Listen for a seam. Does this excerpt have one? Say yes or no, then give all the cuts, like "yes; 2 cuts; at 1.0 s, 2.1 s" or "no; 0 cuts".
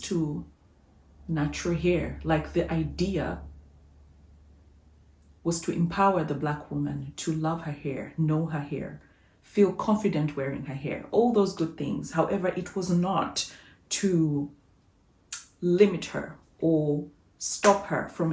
no; 0 cuts